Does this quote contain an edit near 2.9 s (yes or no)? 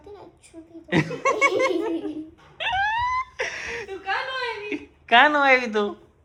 no